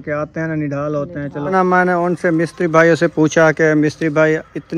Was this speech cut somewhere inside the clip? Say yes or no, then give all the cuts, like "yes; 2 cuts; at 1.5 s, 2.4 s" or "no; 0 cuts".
yes; 1 cut; at 1.5 s